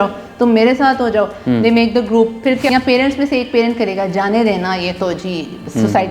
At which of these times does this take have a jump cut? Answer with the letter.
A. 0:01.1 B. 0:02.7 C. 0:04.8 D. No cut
B